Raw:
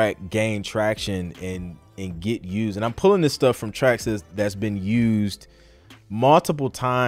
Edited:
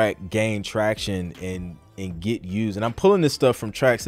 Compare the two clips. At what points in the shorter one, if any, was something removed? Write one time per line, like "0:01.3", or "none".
none